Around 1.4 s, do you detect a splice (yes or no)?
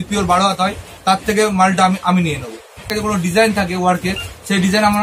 no